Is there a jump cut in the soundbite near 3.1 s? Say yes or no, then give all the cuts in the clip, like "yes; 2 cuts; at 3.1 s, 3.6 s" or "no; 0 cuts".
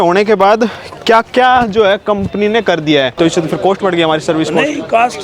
yes; 1 cut; at 3.1 s